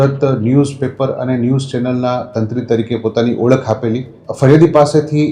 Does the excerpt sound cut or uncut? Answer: cut